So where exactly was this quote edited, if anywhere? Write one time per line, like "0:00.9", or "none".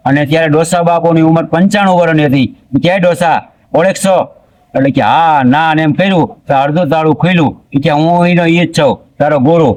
none